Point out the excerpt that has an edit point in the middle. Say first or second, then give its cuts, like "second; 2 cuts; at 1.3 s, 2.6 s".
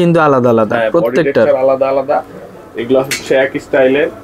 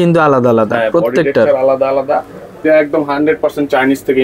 second; 1 cut; at 2.5 s